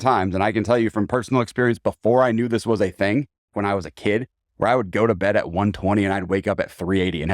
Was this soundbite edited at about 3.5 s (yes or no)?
yes